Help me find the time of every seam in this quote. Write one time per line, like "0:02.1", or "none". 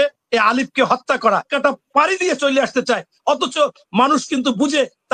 0:01.5